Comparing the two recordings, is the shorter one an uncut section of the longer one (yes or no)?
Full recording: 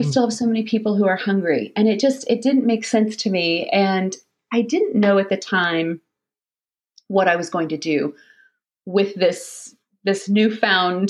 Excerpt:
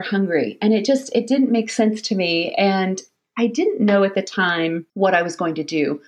no